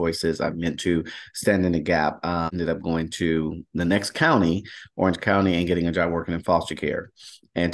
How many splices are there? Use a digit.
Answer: 1